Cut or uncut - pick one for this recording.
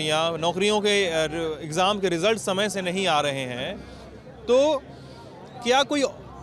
uncut